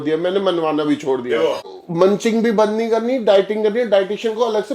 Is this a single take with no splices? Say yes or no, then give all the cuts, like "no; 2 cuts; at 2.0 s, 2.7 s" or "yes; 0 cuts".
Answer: no; 1 cut; at 1.7 s